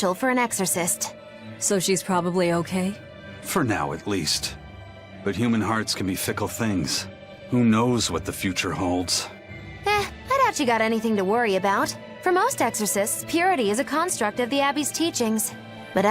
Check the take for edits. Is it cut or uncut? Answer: cut